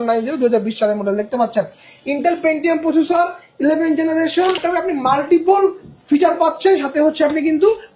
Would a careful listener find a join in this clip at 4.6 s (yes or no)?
yes